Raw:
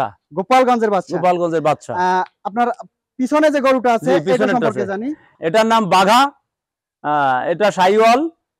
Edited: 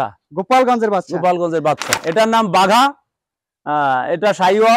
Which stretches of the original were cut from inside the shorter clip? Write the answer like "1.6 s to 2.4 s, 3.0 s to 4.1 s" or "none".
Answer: 1.9 s to 5.3 s